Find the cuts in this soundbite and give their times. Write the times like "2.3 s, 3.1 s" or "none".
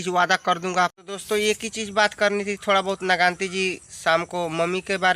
1.0 s